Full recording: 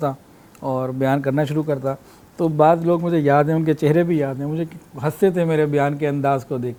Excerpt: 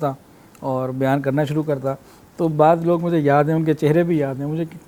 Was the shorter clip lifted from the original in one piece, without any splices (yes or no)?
yes